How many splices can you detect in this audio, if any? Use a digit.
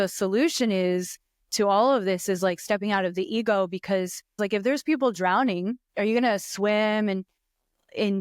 2